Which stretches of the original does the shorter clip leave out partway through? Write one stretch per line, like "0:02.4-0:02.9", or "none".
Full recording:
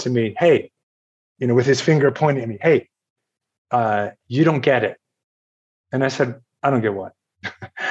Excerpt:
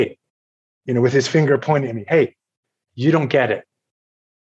0:03.4-0:04.2